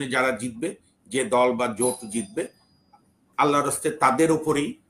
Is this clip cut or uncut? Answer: uncut